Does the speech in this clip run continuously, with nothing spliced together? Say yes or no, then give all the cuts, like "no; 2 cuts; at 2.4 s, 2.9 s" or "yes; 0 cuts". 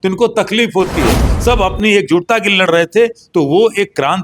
no; 1 cut; at 1.2 s